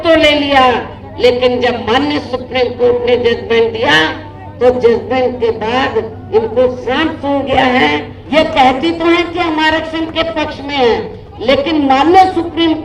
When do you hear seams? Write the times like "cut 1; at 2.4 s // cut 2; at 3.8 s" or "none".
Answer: cut 1; at 8.1 s